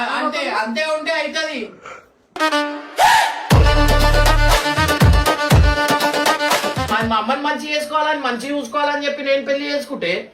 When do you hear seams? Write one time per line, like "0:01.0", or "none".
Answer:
0:06.9